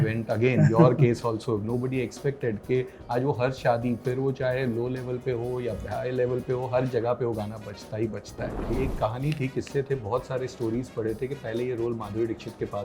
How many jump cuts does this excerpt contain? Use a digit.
1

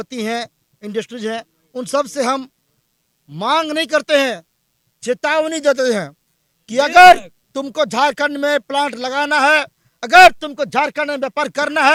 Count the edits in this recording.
0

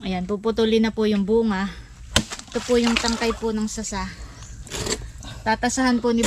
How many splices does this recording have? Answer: 1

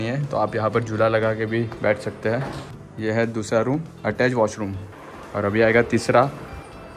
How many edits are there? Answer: 0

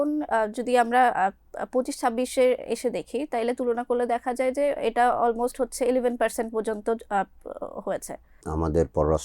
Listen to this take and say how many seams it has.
1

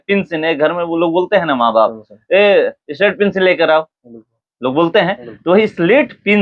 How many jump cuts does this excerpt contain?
0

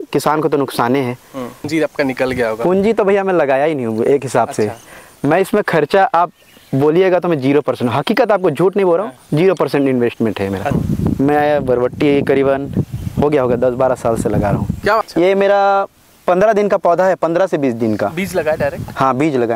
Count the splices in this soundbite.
3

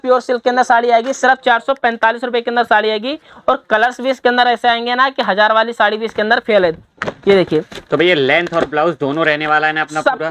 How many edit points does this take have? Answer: 0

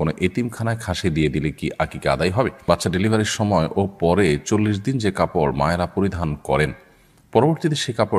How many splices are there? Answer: 1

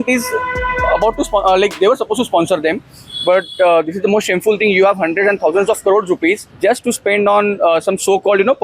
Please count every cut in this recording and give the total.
1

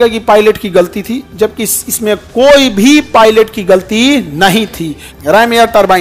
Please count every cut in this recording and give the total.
1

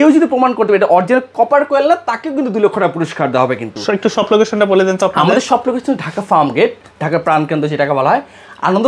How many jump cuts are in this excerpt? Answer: 0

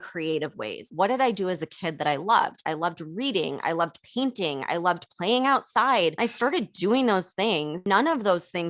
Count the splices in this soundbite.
3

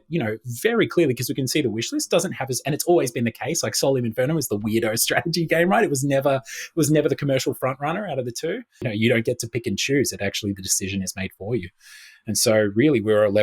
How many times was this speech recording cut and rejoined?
1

